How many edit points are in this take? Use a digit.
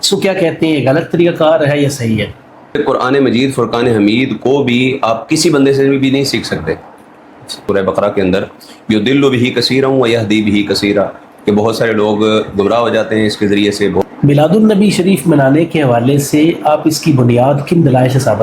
3